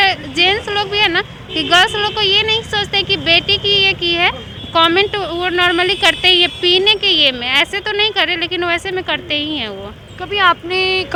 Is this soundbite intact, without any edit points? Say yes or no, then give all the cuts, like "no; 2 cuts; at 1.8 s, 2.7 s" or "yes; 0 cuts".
yes; 0 cuts